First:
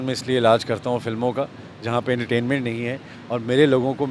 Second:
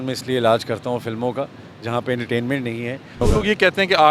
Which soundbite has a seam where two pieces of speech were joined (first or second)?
second